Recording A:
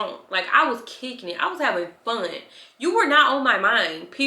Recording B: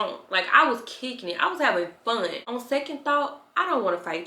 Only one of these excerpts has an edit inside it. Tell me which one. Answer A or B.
B